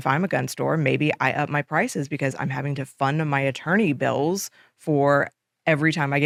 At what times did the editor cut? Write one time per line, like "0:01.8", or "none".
none